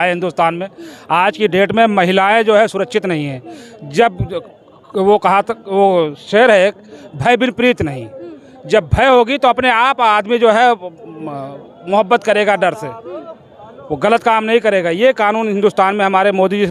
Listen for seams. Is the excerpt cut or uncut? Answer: uncut